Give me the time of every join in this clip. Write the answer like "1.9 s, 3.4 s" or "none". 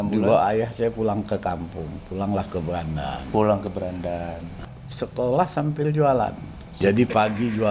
4.8 s, 6.7 s